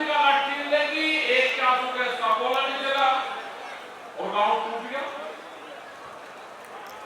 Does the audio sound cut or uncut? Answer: uncut